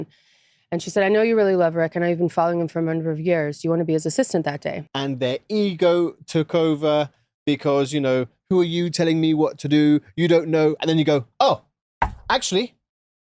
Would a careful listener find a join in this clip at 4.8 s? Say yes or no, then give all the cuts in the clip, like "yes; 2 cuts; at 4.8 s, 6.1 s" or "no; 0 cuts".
yes; 1 cut; at 4.8 s